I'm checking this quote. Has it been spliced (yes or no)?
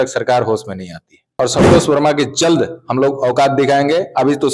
yes